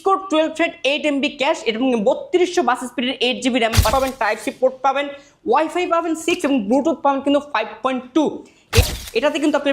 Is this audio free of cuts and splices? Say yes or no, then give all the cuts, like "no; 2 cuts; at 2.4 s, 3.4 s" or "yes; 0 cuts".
no; 2 cuts; at 3.9 s, 8.8 s